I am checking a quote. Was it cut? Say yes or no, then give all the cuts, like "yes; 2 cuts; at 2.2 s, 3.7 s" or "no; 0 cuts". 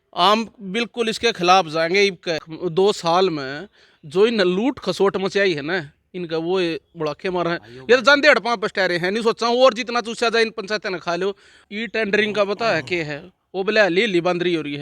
yes; 2 cuts; at 2.5 s, 11.5 s